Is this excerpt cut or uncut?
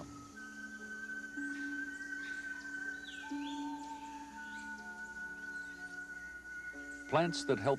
cut